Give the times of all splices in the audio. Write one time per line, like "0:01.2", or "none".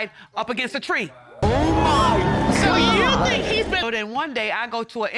0:03.8